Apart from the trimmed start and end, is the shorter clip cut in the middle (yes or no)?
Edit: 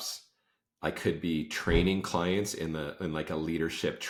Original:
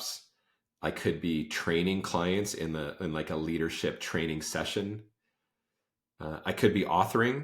no